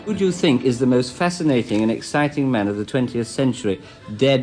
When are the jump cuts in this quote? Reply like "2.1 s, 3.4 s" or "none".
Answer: none